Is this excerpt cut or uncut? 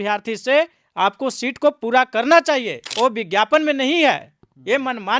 cut